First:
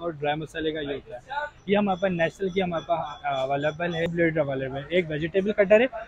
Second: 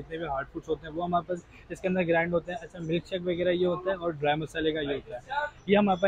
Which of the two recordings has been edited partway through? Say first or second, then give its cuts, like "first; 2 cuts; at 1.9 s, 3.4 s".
first; 1 cut; at 4.1 s